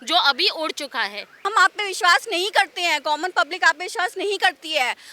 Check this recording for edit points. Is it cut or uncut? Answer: cut